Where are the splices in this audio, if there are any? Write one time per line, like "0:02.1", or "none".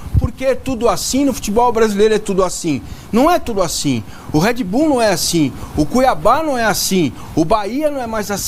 none